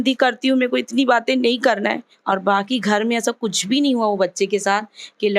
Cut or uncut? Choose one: cut